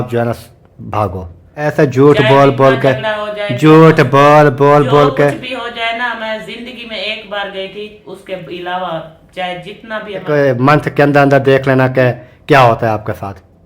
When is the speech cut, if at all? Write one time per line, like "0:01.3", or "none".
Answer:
0:01.6
0:10.2